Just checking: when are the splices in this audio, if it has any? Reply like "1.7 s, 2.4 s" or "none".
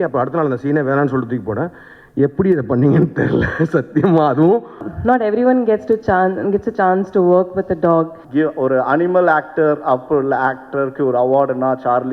4.9 s, 8.2 s